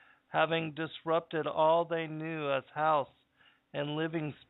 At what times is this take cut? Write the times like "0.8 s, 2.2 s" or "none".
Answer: 1.3 s